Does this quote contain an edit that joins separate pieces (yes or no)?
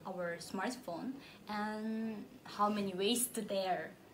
no